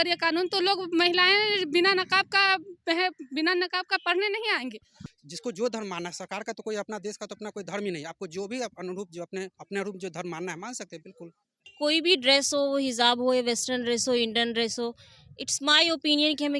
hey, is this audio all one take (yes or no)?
no